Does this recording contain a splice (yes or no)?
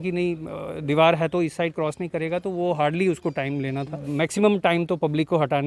yes